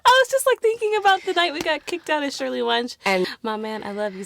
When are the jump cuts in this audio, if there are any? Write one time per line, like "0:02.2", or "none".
0:03.3